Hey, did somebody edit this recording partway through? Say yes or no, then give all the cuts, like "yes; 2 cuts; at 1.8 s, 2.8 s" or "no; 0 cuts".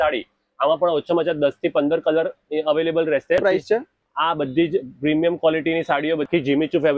yes; 2 cuts; at 3.4 s, 6.3 s